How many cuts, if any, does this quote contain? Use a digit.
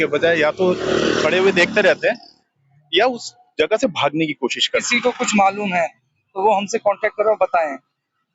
1